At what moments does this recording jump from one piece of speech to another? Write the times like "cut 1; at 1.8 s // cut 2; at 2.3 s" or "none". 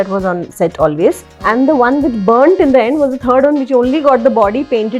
cut 1; at 1.3 s